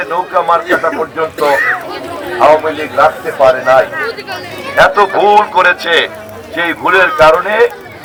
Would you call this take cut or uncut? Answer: uncut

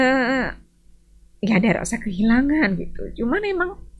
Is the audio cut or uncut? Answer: uncut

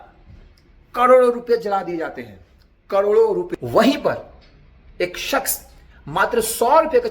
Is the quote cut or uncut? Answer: cut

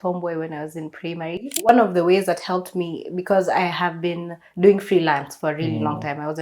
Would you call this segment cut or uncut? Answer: cut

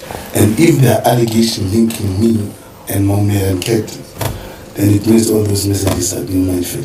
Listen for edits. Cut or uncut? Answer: uncut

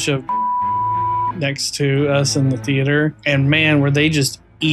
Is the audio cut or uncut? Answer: uncut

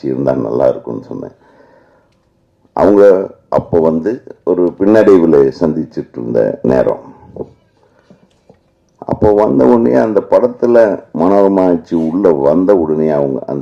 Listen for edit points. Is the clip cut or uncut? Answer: uncut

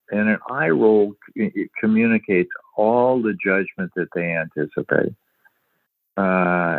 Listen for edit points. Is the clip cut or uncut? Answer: uncut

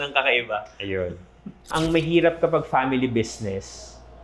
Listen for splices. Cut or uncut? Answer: cut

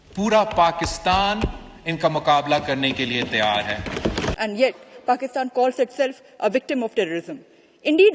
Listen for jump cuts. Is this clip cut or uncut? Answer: cut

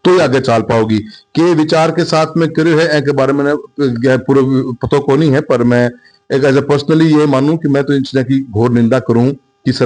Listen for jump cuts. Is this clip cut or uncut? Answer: uncut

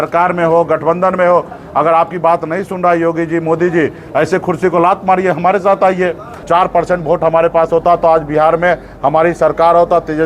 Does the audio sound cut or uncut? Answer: cut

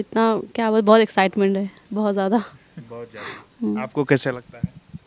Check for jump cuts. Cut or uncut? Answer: uncut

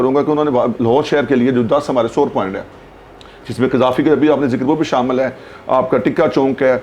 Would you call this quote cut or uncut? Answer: uncut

